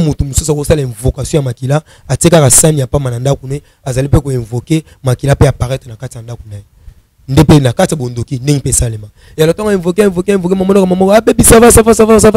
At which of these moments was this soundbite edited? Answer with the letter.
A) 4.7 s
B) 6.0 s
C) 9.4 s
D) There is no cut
D